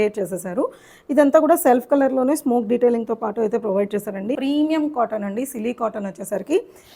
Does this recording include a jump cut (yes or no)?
yes